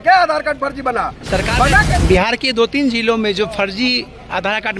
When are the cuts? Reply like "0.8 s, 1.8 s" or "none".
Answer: 1.9 s